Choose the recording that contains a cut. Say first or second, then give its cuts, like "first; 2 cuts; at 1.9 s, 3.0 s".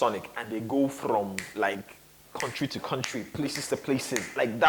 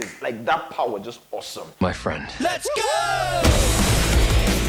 second; 1 cut; at 1.6 s